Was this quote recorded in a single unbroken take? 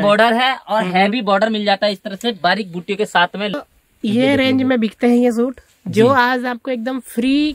no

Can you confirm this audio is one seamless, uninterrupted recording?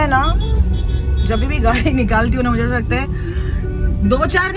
yes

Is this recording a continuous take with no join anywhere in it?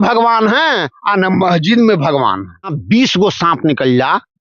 no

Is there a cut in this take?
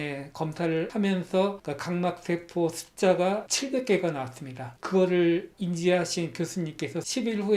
yes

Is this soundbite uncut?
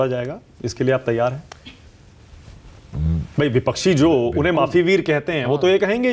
yes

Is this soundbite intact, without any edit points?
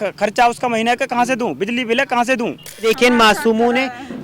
no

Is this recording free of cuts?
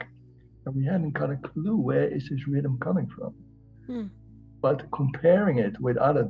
yes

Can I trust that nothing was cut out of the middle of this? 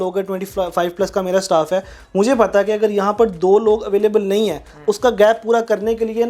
yes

